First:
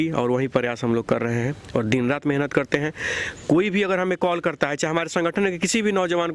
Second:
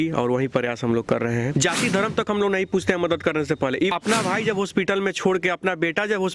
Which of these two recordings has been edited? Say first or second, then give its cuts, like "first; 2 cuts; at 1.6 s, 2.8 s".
second; 2 cuts; at 1.5 s, 3.9 s